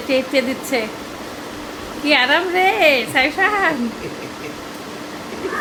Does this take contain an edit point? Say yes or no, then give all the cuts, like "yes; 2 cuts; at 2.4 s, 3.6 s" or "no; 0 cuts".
no; 0 cuts